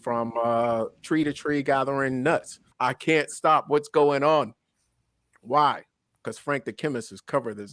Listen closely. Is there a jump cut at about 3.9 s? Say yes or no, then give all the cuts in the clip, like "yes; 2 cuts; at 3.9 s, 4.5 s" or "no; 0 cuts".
no; 1 cut; at 2.7 s